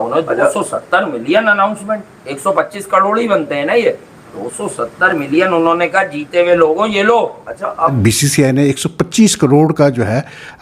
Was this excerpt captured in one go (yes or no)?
no